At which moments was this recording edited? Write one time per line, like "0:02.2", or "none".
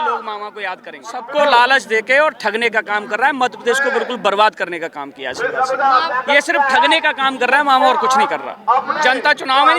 0:01.2
0:06.1
0:08.5